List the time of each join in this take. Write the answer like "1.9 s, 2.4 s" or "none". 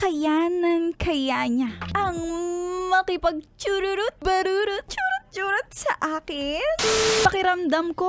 1.8 s, 4.2 s, 4.9 s, 7.2 s

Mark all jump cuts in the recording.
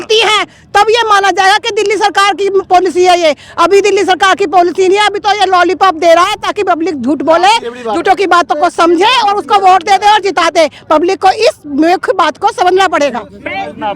none

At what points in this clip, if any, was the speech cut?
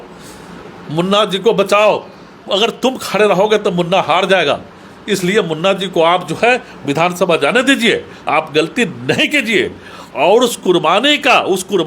none

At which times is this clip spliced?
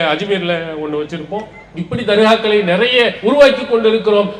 1.6 s, 3.2 s

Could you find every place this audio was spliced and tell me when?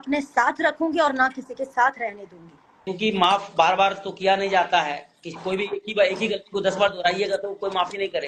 2.9 s

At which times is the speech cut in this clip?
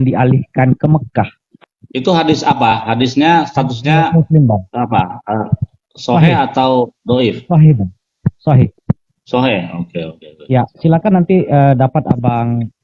8.8 s, 10.7 s

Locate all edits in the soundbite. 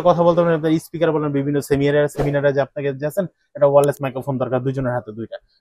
none

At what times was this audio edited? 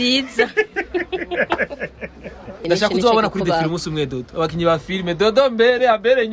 2.6 s

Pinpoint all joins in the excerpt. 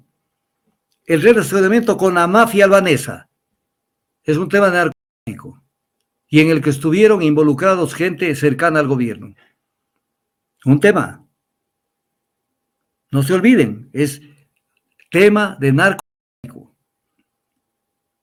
none

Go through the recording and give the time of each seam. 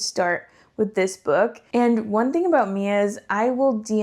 1.6 s

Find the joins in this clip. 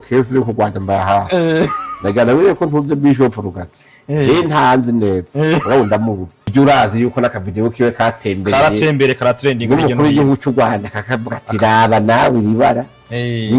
6.5 s

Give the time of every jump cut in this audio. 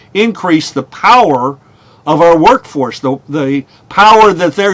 none

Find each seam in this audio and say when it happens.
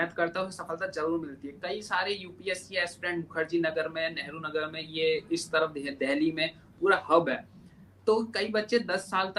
none

